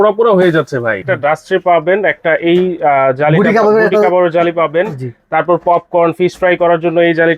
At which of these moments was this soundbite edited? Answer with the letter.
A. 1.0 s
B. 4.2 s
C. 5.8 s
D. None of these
A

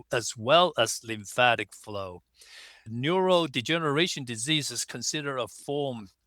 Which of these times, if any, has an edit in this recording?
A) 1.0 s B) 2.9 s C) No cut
B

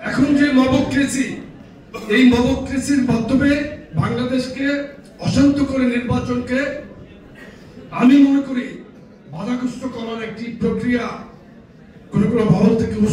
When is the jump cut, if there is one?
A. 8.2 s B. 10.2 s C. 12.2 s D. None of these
D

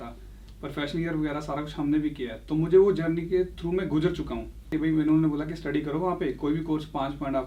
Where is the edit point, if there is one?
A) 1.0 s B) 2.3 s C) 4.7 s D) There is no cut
C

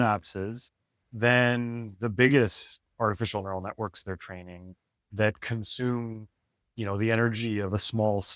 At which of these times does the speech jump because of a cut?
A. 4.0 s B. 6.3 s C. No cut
C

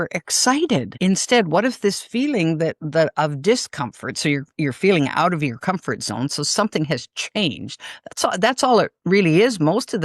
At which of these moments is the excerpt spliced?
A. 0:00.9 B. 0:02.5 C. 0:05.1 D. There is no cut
A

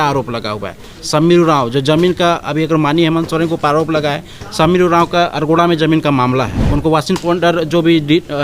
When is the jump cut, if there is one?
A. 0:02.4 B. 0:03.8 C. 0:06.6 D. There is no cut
C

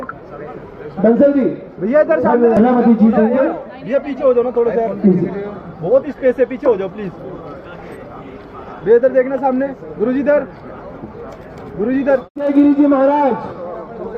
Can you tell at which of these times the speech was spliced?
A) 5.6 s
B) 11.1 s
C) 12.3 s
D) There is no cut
C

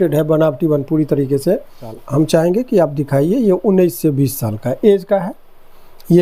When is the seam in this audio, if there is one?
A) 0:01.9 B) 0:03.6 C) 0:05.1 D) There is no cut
A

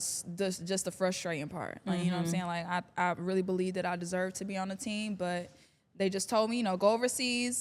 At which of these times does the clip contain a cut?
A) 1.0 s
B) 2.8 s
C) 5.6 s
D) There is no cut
D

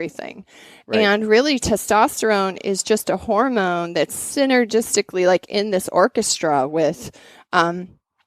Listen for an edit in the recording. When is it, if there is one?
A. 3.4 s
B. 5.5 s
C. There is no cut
C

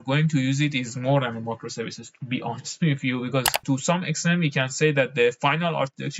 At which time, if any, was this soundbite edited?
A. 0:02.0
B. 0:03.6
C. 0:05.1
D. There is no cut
B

